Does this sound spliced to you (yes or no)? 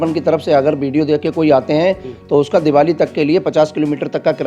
no